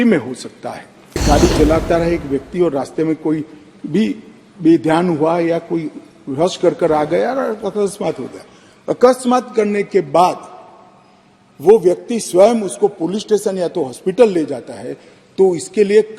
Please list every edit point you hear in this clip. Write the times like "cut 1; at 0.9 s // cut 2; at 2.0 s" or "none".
cut 1; at 1.2 s